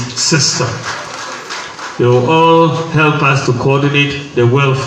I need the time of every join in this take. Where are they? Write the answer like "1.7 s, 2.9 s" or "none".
none